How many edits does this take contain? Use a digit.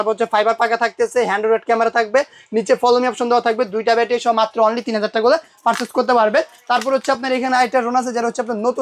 0